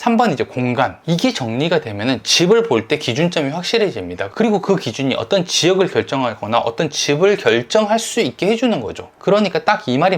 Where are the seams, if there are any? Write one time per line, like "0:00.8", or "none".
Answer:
0:01.0
0:09.1